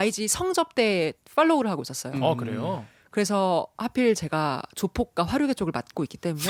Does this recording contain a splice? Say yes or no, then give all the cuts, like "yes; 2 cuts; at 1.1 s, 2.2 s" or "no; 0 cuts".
no; 0 cuts